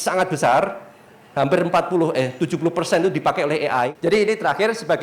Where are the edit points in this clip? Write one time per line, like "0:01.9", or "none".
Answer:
0:03.9